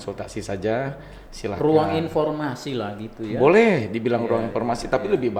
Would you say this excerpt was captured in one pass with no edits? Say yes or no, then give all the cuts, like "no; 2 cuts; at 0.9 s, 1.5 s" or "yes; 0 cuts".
yes; 0 cuts